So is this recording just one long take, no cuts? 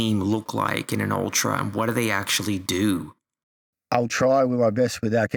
yes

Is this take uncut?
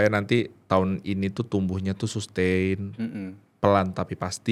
yes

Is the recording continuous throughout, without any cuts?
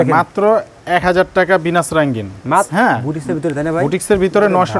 no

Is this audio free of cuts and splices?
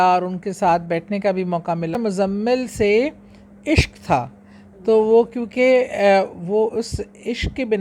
no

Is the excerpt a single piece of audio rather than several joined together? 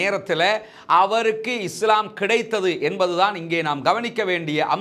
yes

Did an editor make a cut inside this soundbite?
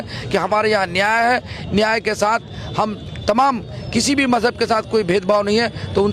no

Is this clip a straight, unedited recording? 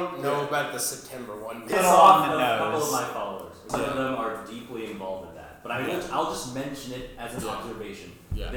no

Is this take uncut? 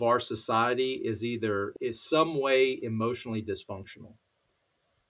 no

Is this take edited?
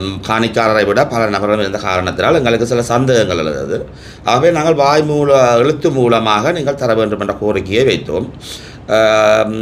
no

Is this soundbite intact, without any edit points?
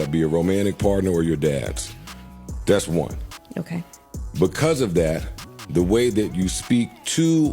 no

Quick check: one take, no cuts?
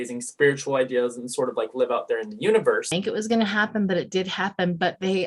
no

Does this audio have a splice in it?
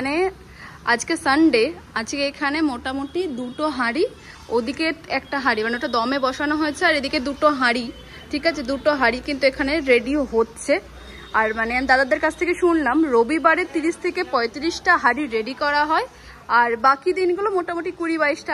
no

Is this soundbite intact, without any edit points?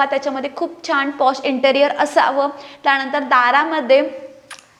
yes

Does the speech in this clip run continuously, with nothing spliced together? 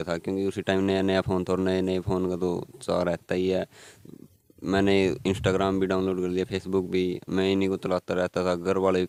yes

